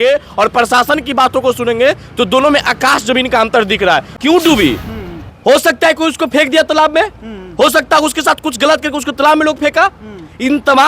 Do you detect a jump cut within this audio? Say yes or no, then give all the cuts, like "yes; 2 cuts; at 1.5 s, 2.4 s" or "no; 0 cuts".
yes; 1 cut; at 4.1 s